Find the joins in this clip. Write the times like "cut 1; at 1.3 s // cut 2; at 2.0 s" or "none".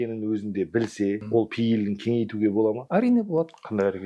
cut 1; at 1.2 s // cut 2; at 2.8 s